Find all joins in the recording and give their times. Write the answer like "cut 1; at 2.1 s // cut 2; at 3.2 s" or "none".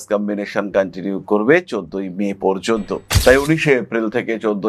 none